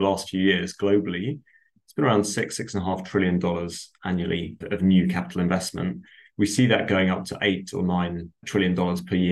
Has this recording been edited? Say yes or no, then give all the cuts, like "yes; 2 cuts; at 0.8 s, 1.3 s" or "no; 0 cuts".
no; 0 cuts